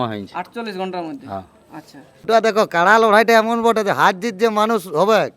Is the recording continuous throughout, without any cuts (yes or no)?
no